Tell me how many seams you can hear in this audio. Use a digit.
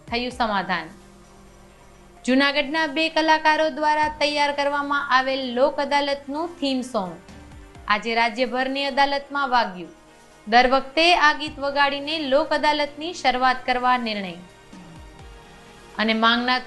0